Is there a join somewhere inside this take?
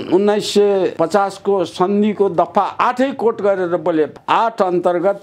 yes; 1 cut; at 4.1 s

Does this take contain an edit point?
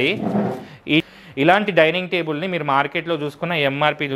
yes; 1 cut; at 1.1 s

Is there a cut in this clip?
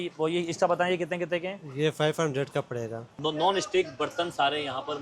yes; 1 cut; at 3.1 s

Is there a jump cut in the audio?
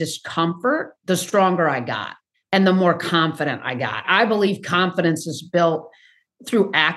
yes; 1 cut; at 0.9 s

